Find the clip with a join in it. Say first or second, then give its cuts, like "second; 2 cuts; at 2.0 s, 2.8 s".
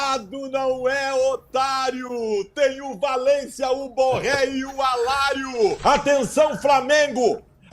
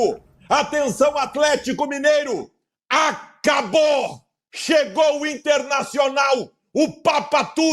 first; 1 cut; at 5.8 s